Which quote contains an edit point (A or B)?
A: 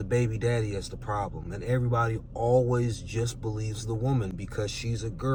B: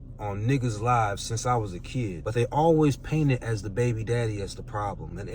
B